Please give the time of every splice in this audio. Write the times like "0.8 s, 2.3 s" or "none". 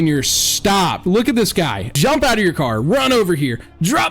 1.8 s